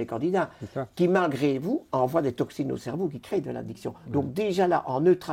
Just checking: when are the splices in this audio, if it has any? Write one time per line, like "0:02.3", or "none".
none